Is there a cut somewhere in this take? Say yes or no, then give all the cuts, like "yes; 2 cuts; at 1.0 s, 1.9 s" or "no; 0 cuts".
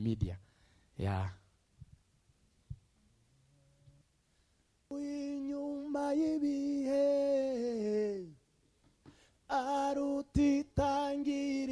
yes; 1 cut; at 4.9 s